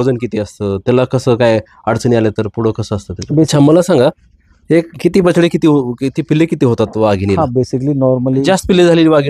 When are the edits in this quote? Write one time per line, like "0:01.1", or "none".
0:03.5
0:08.4

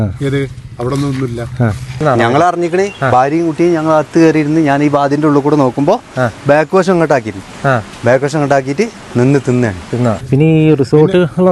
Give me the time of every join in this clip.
0:02.0
0:10.2

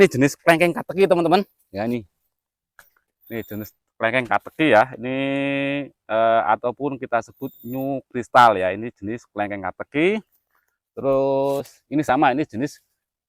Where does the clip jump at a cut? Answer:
none

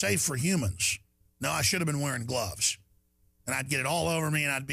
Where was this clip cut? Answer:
none

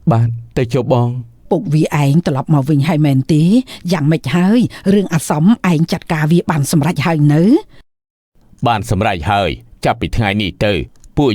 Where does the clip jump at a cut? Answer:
0:01.3

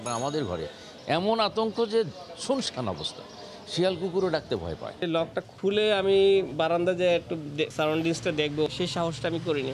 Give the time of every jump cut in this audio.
0:00.9
0:05.0
0:07.7
0:08.7

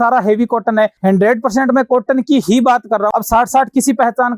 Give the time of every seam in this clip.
0:01.0
0:03.1

